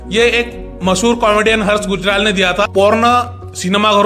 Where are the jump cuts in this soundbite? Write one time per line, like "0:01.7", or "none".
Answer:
0:02.7